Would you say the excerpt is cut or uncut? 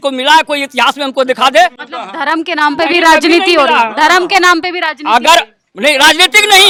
uncut